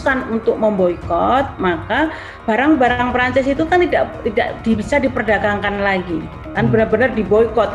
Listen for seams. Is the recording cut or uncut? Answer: uncut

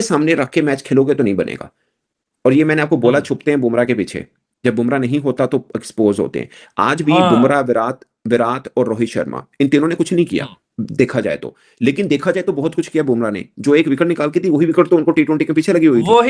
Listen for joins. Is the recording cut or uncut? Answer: uncut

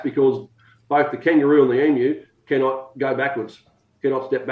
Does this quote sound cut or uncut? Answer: uncut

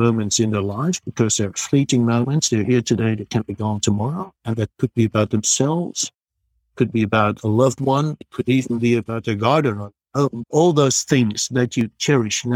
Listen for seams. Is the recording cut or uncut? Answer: cut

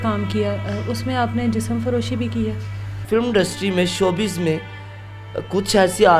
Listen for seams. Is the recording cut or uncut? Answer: cut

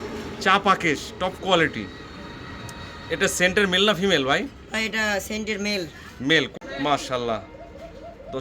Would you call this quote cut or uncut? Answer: cut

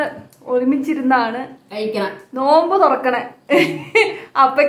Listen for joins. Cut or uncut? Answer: uncut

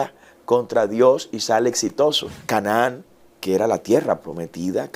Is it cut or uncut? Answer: cut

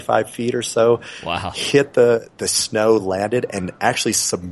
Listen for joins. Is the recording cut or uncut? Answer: uncut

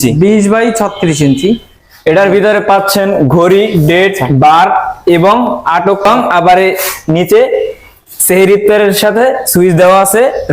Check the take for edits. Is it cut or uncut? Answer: cut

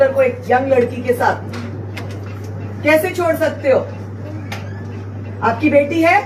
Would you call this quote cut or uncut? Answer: uncut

